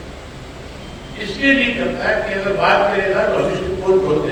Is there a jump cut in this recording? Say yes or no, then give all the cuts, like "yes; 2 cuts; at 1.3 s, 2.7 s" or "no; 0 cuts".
no; 0 cuts